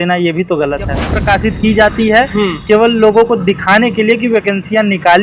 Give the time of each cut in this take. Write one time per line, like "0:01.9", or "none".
0:01.1